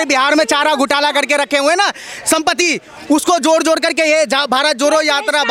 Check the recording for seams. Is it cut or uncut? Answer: uncut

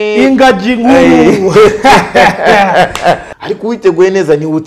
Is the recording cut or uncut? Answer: cut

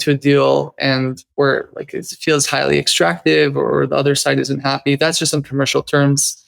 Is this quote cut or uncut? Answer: cut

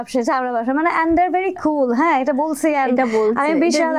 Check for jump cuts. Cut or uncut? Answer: uncut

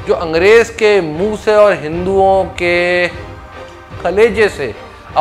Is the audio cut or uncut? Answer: uncut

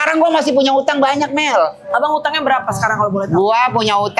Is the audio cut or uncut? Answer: uncut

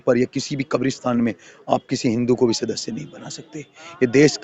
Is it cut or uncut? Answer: uncut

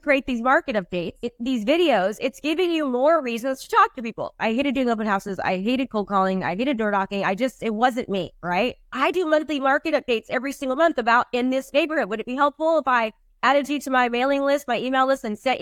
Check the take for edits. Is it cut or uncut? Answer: cut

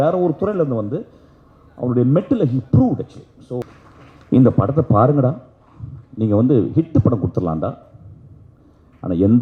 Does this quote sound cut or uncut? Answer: cut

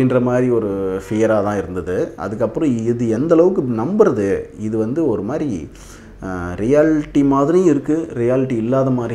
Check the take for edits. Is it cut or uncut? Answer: uncut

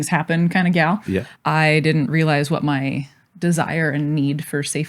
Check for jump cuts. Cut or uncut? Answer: cut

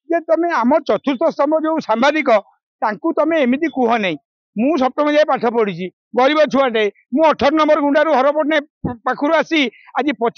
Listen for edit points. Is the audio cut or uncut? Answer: uncut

